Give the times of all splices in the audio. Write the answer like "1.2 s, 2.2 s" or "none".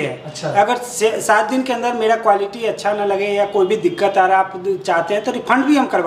none